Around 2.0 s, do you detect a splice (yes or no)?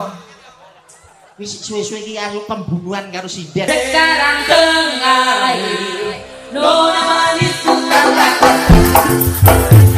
no